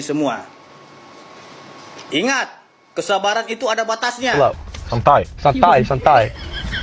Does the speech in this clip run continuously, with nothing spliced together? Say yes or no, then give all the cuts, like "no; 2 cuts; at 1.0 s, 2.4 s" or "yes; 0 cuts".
no; 1 cut; at 4.3 s